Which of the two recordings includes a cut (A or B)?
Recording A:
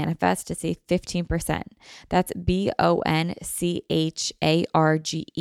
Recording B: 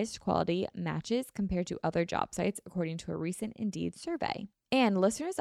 B